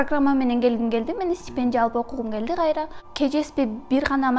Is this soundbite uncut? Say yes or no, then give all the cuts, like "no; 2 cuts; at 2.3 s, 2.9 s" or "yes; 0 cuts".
no; 1 cut; at 3.0 s